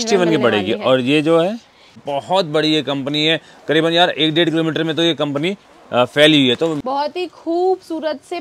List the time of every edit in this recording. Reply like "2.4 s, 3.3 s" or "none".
2.0 s, 6.8 s